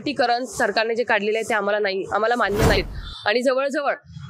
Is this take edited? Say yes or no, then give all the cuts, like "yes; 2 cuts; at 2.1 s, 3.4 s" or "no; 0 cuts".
yes; 1 cut; at 2.8 s